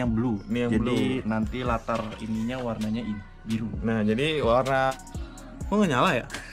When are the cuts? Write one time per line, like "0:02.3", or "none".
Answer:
0:04.9